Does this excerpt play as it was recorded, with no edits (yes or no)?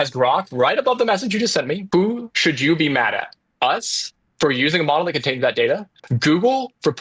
no